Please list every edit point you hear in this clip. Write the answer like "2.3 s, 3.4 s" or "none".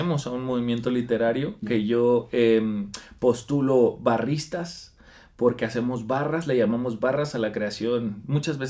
none